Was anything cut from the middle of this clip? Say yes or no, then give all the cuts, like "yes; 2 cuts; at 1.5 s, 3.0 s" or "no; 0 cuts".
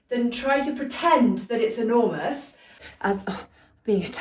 yes; 1 cut; at 2.7 s